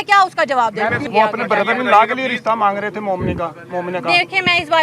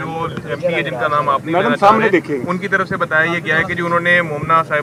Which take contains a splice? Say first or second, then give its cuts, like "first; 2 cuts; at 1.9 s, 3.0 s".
first; 1 cut; at 1.0 s